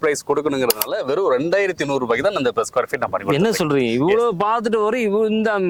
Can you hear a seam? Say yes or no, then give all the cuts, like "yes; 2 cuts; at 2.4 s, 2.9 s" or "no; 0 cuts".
no; 0 cuts